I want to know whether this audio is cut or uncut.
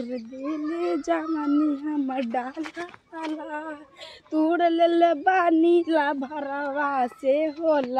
uncut